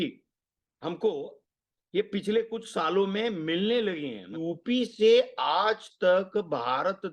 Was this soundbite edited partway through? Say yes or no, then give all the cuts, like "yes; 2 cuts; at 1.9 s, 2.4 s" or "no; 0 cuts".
yes; 1 cut; at 4.3 s